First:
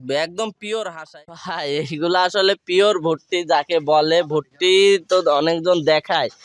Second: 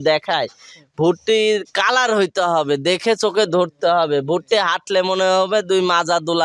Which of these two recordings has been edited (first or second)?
first